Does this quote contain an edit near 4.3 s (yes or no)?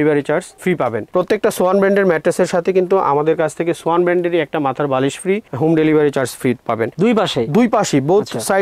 no